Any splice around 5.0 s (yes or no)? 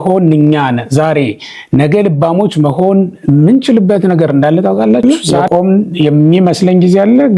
yes